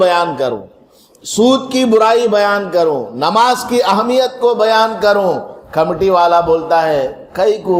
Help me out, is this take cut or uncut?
uncut